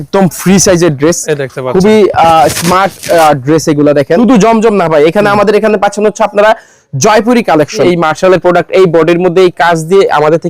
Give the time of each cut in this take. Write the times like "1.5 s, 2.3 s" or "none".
4.2 s, 7.8 s

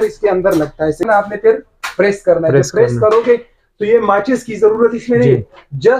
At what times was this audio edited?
1.0 s

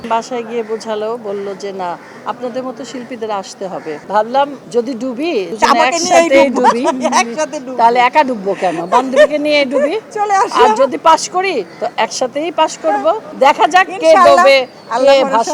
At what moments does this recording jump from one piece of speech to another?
4.0 s, 5.1 s, 13.3 s

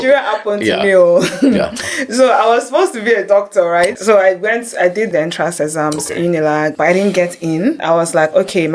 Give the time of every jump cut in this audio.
4.0 s, 5.1 s, 6.7 s, 7.8 s

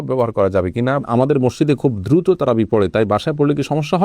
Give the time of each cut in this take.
1.0 s

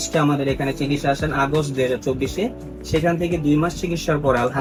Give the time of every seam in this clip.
none

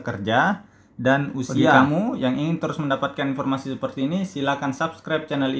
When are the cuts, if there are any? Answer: 1.7 s

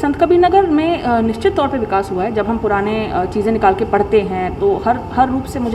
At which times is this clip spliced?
none

